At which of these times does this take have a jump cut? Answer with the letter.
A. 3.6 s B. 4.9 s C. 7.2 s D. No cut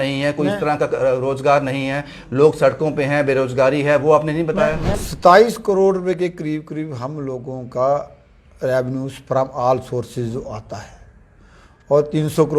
B